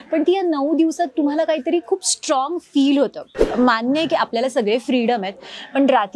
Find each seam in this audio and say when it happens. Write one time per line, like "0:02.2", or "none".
0:03.3